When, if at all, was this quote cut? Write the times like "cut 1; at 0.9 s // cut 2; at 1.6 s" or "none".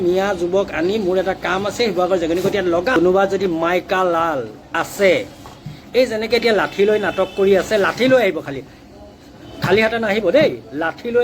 cut 1; at 3.0 s // cut 2; at 4.6 s